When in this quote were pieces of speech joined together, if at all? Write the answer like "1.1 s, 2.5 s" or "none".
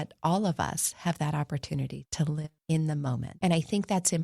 2.5 s, 3.4 s